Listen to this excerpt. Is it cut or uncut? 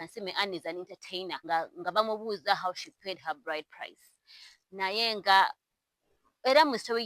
cut